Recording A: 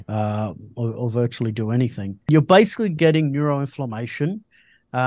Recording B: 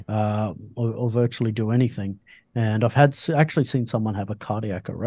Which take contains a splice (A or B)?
A